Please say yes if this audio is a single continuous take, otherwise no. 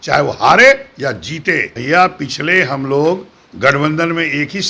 no